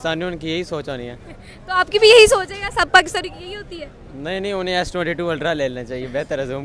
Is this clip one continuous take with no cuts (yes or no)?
yes